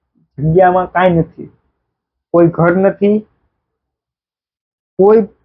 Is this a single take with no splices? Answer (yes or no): yes